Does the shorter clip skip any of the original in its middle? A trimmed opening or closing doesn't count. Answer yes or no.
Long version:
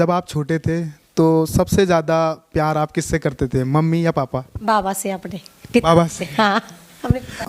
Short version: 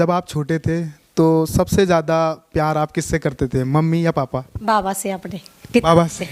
no